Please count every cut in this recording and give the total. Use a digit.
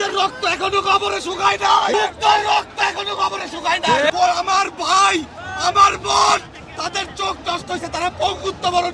2